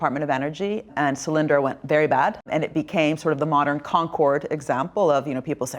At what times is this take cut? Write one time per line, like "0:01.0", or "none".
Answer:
0:00.9
0:02.4